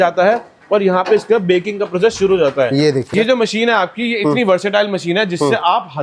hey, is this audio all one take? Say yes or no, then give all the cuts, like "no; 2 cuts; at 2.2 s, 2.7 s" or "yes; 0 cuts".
no; 1 cut; at 3.1 s